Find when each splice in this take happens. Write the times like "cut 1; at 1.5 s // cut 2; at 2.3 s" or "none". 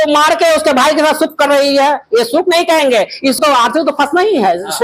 cut 1; at 3.4 s